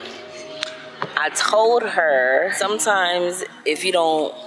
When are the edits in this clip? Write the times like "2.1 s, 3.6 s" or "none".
2.6 s